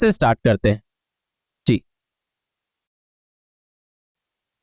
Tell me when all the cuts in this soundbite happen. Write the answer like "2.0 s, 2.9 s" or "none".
none